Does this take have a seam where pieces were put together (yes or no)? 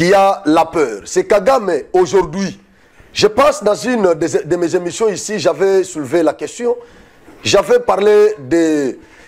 no